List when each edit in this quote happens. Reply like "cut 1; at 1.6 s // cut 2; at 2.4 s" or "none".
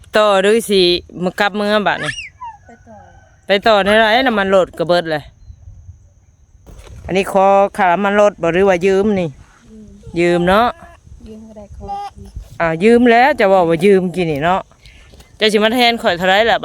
cut 1; at 6.1 s

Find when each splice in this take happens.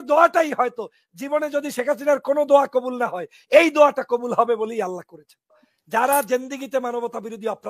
cut 1; at 5.7 s

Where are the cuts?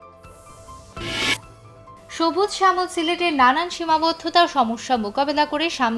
cut 1; at 0.9 s

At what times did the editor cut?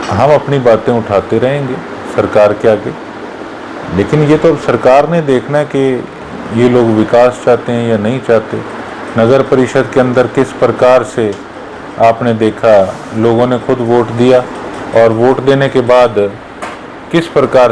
none

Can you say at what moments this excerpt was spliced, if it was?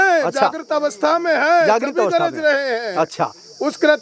none

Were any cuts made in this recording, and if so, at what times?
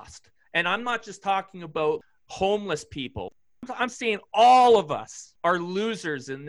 cut 1; at 2.0 s // cut 2; at 3.3 s // cut 3; at 5.2 s

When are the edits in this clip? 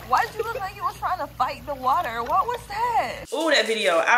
cut 1; at 3.2 s

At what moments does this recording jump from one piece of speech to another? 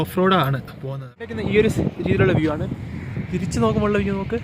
cut 1; at 1.4 s

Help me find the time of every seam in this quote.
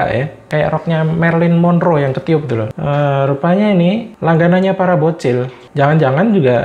cut 1; at 2.7 s // cut 2; at 4.1 s

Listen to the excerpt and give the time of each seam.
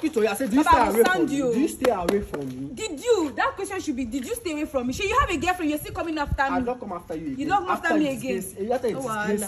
none

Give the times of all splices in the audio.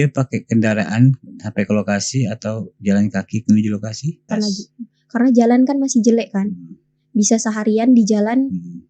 cut 1; at 4.3 s

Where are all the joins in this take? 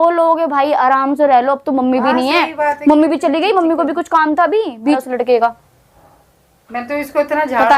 cut 1; at 5.0 s

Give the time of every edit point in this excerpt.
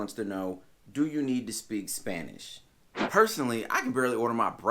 cut 1; at 3.1 s

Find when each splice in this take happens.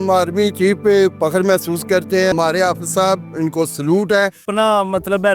cut 1; at 2.3 s // cut 2; at 4.5 s

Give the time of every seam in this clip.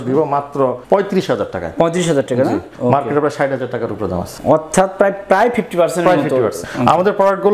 cut 1; at 0.8 s // cut 2; at 2.7 s // cut 3; at 4.3 s // cut 4; at 6.6 s

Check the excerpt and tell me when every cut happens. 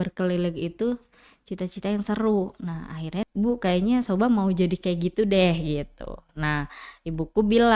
cut 1; at 3.2 s

